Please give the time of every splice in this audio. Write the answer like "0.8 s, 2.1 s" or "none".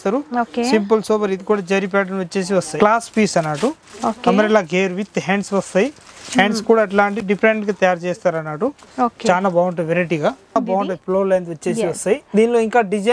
2.7 s, 10.5 s